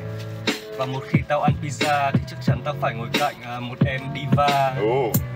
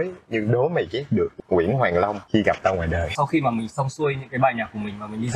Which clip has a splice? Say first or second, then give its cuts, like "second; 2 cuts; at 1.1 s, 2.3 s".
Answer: second; 3 cuts; at 1.3 s, 2.2 s, 3.1 s